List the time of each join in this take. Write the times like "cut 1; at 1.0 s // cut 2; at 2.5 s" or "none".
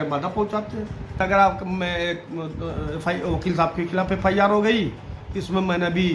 cut 1; at 1.2 s